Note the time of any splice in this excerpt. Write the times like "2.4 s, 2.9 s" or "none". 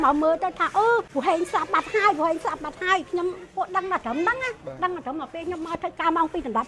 1.1 s